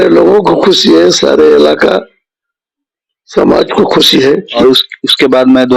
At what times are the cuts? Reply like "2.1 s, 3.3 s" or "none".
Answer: 4.5 s